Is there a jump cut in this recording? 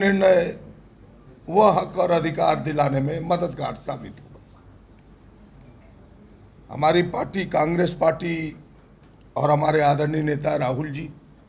no; 0 cuts

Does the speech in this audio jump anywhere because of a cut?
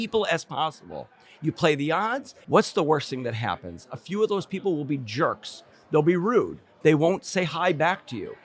yes; 1 cut; at 2.3 s

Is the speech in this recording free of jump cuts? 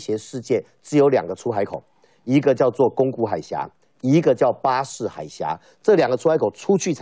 yes; 0 cuts

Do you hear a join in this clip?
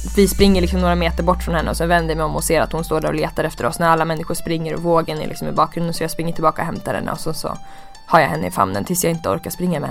no; 0 cuts

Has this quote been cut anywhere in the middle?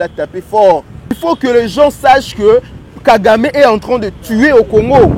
yes; 1 cut; at 1.2 s

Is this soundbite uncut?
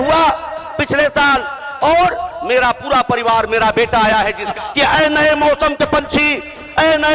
no; 1 cut; at 4.5 s

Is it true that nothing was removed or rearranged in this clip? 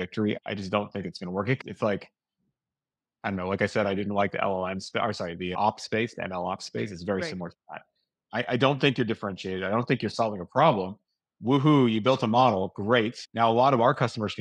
yes; 0 cuts

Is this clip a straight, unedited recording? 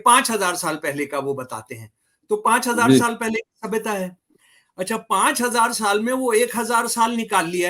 yes; 0 cuts

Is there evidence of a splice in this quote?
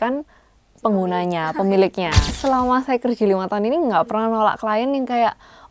yes; 1 cut; at 2.2 s

